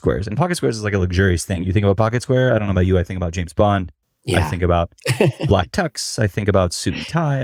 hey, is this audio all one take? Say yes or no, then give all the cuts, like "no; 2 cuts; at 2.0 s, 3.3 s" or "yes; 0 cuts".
yes; 0 cuts